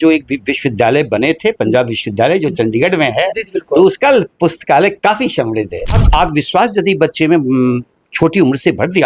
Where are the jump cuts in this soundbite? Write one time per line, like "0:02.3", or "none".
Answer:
0:06.0